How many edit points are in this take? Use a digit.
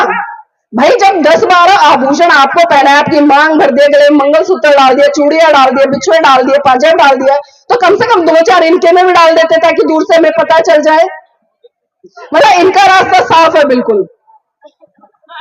0